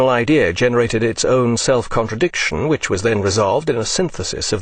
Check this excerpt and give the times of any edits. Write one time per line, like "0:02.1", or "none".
none